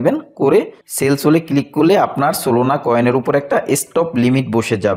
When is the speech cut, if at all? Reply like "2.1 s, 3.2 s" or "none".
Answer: none